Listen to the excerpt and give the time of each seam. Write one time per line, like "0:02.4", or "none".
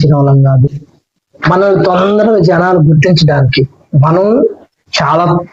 none